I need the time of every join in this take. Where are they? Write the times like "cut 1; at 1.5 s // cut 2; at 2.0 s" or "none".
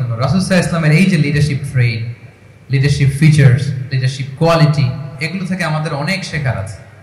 cut 1; at 5.1 s